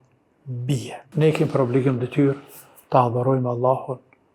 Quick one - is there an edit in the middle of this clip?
yes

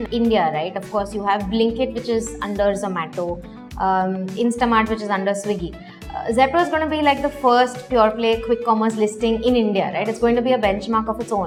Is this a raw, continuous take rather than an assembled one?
yes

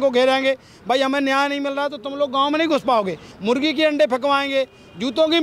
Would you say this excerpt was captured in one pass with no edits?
no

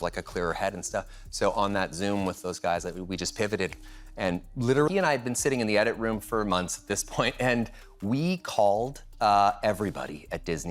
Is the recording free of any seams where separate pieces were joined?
no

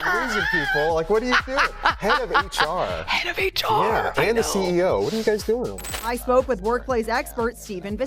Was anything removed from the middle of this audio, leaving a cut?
yes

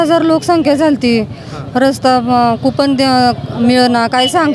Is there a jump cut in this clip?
no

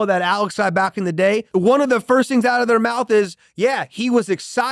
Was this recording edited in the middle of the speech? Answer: yes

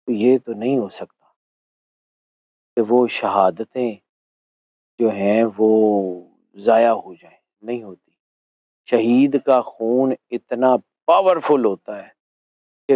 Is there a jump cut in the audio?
no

